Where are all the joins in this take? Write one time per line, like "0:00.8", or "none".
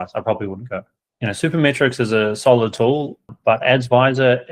0:01.0
0:03.3